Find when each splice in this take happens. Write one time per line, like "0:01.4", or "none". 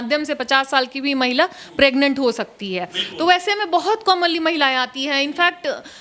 none